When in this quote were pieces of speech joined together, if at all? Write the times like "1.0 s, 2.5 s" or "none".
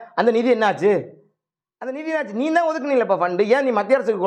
none